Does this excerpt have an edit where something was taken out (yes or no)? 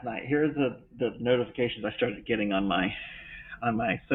no